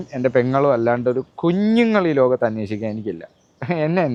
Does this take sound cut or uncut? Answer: uncut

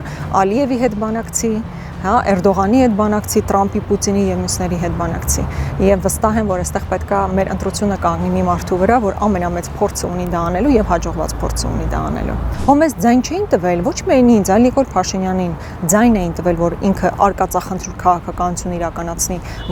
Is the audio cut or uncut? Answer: cut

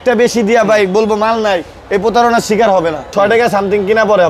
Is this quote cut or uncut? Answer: cut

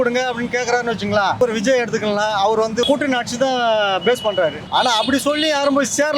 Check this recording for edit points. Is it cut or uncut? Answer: cut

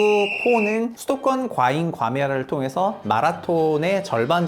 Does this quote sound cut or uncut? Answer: cut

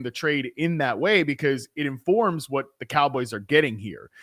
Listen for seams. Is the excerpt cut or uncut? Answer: uncut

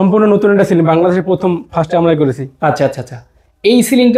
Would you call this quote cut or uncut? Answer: uncut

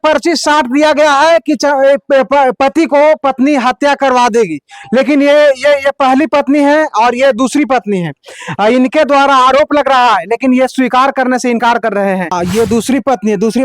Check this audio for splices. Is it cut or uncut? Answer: cut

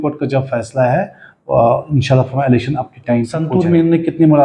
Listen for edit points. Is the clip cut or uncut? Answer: cut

